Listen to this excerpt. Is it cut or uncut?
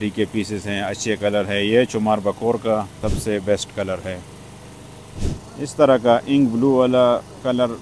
uncut